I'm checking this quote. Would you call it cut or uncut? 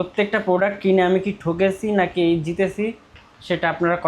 uncut